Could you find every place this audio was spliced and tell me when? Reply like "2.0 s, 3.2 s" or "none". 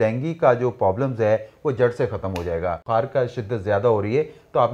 2.8 s